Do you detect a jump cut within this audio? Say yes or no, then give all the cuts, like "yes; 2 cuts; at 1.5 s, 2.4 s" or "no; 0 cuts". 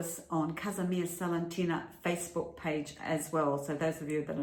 no; 0 cuts